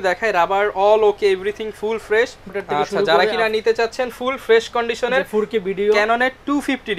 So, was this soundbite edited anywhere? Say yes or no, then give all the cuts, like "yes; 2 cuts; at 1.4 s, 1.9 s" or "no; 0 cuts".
yes; 1 cut; at 2.5 s